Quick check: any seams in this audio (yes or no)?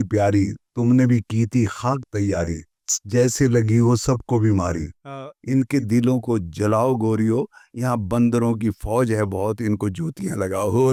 no